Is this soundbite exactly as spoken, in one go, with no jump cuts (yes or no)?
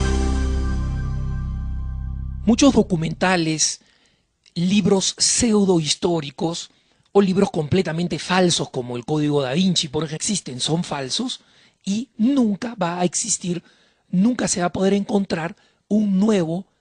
yes